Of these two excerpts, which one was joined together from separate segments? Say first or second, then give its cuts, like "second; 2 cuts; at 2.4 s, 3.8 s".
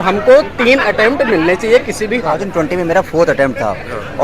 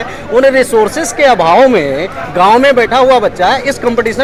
first; 1 cut; at 2.4 s